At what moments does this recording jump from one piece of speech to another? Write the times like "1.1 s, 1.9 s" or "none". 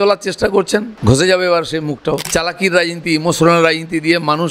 0.9 s, 2.3 s